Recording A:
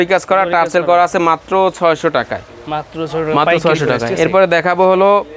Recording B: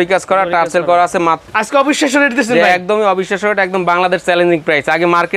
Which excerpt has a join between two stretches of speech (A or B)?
B